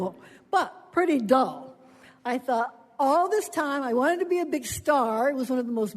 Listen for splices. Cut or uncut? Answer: cut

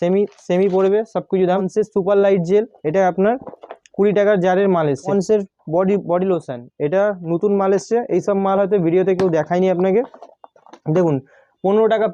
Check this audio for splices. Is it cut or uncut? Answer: cut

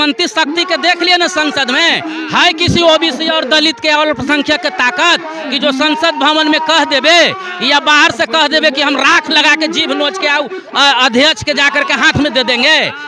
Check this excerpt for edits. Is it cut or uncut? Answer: uncut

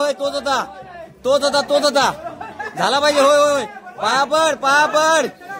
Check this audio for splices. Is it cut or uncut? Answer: uncut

